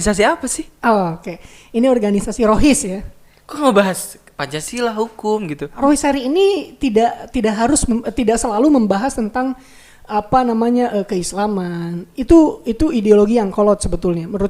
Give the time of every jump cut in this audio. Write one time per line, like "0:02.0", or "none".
0:05.6